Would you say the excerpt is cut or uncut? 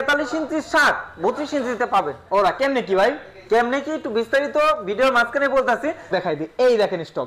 cut